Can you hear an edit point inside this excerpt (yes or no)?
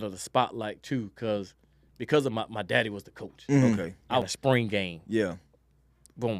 yes